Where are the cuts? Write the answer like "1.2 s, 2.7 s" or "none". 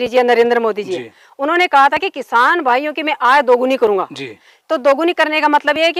none